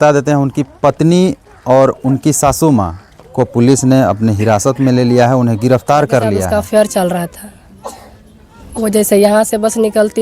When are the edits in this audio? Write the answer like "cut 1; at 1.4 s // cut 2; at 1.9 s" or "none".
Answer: cut 1; at 6.4 s